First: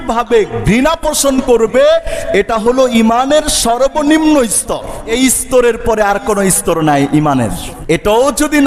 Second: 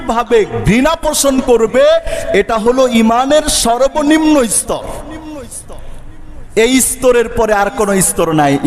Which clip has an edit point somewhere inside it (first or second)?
first